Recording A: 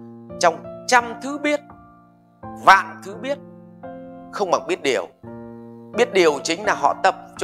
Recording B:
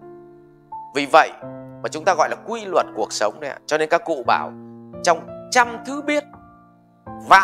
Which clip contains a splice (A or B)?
B